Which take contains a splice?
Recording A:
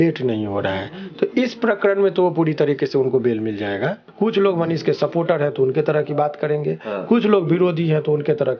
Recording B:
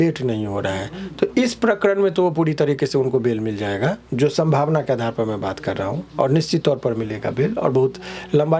A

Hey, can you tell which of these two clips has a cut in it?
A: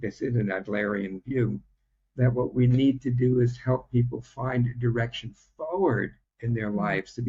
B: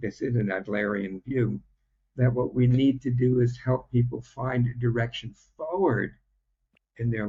A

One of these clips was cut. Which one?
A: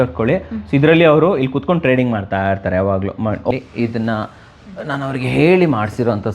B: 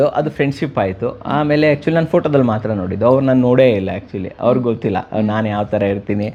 A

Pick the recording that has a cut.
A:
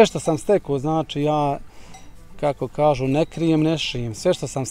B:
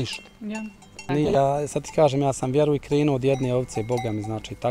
B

